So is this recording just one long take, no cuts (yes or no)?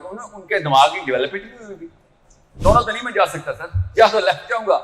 no